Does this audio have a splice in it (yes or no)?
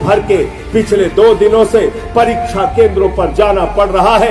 no